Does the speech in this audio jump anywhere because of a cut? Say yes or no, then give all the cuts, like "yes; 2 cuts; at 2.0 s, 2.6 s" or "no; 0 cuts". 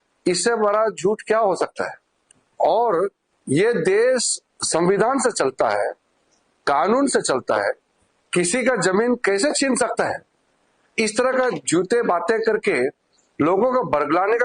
no; 0 cuts